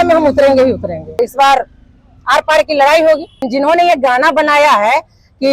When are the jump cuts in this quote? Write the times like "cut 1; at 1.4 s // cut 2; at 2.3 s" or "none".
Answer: cut 1; at 1.2 s // cut 2; at 3.4 s